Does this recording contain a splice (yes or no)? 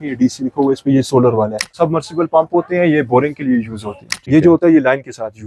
yes